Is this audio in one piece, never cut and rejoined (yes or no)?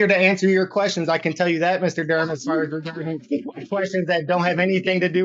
yes